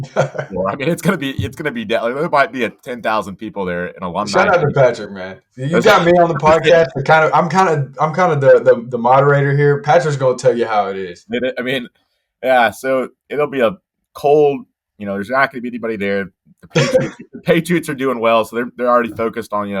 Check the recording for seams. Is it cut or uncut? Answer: uncut